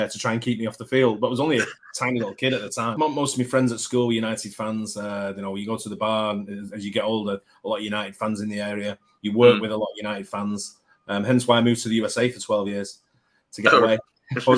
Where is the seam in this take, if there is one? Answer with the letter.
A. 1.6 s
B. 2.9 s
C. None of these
B